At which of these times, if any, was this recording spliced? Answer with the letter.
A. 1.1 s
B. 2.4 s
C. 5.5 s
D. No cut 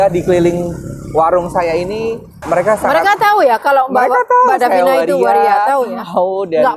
B